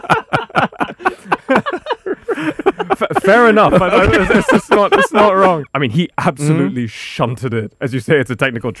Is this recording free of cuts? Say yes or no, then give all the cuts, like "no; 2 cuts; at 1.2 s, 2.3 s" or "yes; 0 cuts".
no; 2 cuts; at 5.6 s, 7.7 s